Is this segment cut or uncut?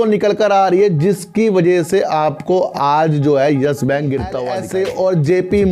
cut